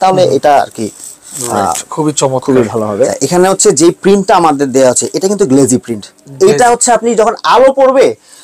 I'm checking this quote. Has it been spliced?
yes; 1 cut; at 3.1 s

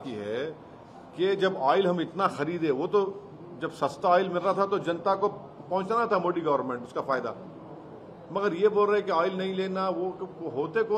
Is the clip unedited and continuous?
yes; 0 cuts

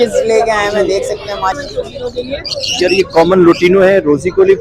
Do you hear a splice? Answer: yes; 1 cut; at 1.6 s

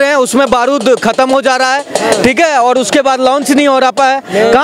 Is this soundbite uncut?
yes; 0 cuts

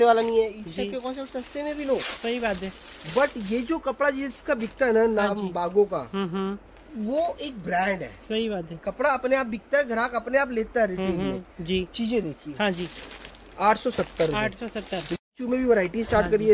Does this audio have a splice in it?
no; 0 cuts

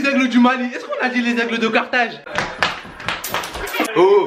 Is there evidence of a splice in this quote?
no; 0 cuts

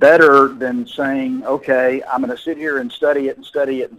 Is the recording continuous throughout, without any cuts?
yes; 0 cuts

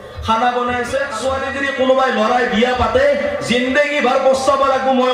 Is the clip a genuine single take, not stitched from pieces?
no; 1 cut; at 1.2 s

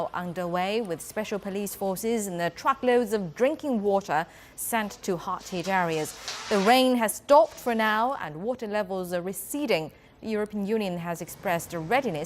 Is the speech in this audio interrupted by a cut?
yes; 1 cut; at 5.0 s

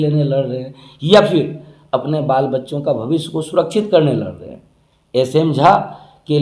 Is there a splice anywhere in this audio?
no; 0 cuts

